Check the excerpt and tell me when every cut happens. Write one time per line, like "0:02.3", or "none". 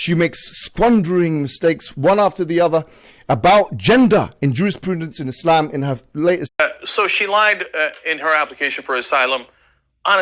0:06.5